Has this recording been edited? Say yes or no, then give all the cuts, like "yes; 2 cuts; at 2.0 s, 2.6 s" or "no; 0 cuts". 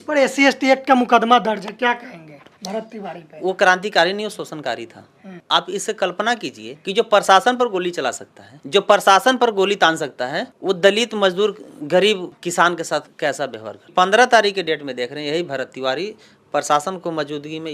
yes; 1 cut; at 13.9 s